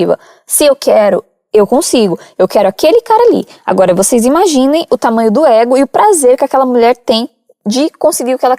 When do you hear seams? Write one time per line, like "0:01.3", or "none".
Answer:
none